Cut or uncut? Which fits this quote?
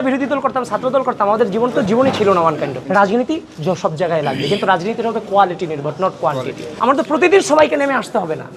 cut